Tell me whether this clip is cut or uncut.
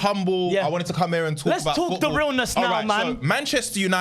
uncut